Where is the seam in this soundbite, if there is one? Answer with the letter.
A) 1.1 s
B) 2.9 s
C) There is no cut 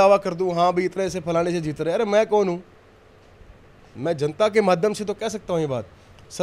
C